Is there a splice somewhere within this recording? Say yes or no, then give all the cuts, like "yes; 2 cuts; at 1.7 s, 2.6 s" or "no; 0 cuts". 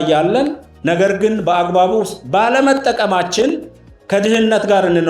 no; 0 cuts